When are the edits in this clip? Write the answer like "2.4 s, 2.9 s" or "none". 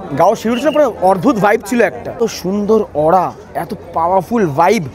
2.0 s